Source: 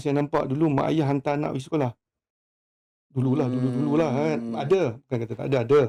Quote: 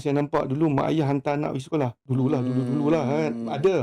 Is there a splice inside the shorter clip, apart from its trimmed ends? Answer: yes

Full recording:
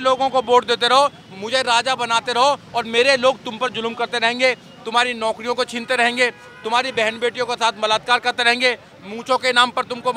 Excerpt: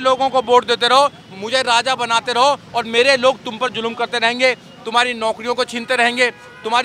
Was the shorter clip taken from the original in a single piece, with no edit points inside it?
yes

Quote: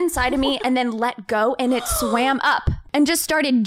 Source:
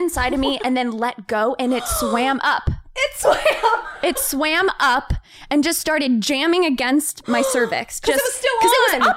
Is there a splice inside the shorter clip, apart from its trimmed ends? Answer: yes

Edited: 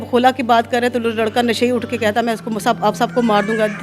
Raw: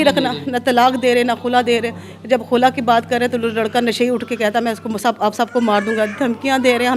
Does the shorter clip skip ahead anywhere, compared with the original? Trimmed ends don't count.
no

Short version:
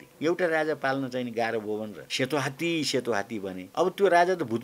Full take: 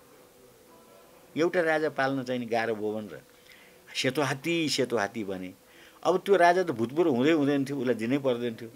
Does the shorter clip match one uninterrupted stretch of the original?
no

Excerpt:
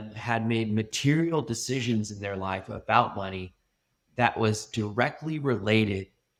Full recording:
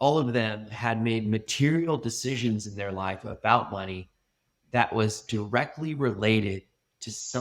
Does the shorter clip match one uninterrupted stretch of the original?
yes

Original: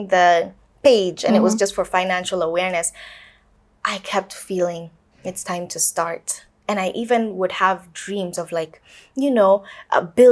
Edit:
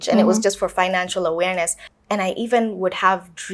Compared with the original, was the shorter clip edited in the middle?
yes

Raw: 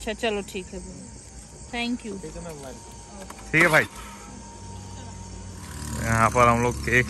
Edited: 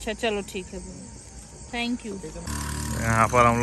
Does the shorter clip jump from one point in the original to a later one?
yes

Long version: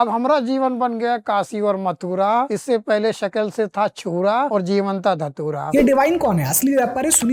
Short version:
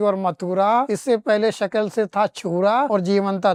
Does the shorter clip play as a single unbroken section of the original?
yes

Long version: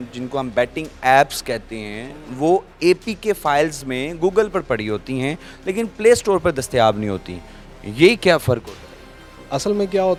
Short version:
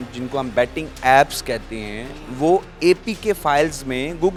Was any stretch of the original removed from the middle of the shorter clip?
no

